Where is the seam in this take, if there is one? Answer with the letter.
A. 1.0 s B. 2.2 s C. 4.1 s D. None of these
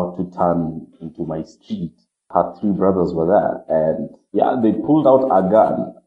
B